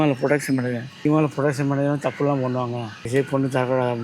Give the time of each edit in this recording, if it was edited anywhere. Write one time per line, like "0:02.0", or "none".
0:00.9
0:03.1